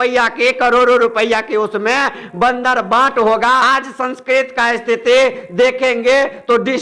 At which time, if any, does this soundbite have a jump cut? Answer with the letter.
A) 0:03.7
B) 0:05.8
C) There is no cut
A